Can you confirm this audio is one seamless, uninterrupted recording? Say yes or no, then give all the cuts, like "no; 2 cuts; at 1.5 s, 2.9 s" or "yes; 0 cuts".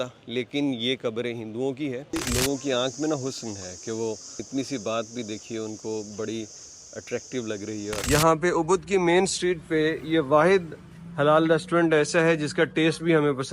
no; 3 cuts; at 2.2 s, 4.5 s, 8.0 s